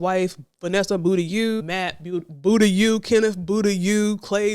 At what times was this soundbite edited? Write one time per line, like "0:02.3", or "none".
0:01.6